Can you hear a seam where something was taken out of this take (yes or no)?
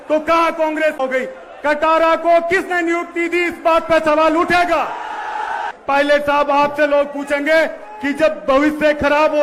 yes